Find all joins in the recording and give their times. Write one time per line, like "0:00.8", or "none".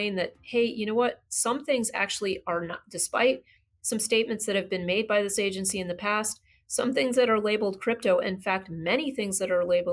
none